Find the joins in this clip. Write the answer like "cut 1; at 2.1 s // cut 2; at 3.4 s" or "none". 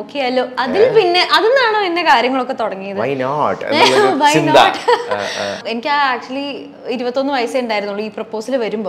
cut 1; at 5.6 s